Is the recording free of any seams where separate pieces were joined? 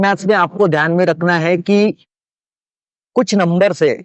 yes; 0 cuts

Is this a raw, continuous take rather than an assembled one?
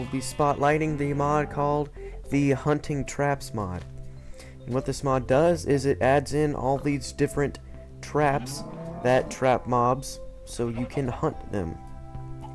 yes; 0 cuts

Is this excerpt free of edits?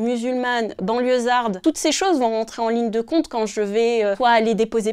no; 2 cuts; at 1.6 s, 4.2 s

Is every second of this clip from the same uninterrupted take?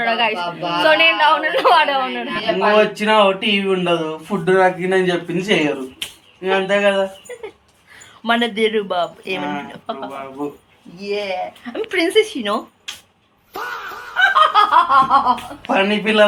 yes; 0 cuts

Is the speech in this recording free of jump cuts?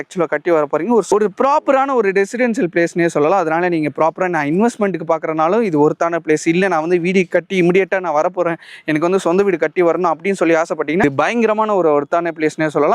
yes; 0 cuts

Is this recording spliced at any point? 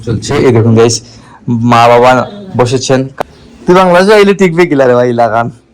yes; 1 cut; at 3.1 s

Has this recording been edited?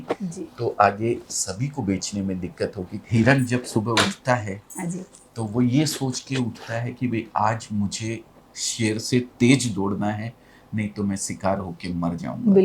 yes; 1 cut; at 3.0 s

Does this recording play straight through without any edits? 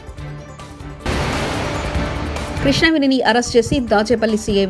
no; 2 cuts; at 1.0 s, 2.6 s

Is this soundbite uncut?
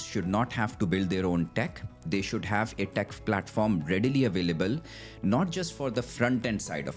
yes; 0 cuts

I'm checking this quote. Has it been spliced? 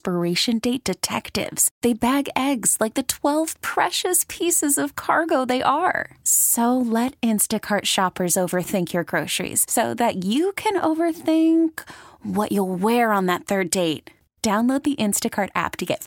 no; 0 cuts

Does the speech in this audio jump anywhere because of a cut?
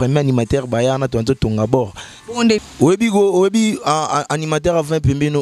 yes; 1 cut; at 2.6 s

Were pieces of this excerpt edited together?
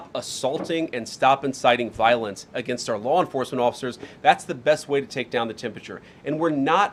no; 0 cuts

